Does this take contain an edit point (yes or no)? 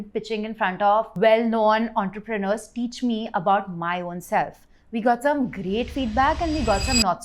yes